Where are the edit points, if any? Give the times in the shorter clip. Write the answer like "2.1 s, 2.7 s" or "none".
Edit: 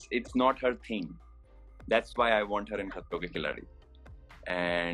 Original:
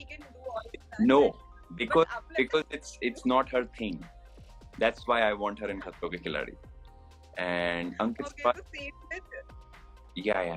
none